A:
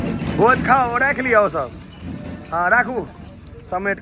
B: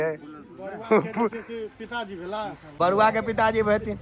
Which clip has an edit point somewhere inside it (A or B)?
B